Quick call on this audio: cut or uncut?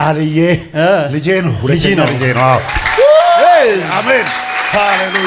uncut